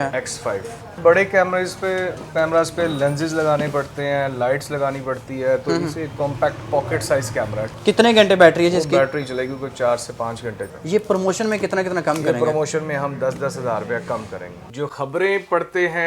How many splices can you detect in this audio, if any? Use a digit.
4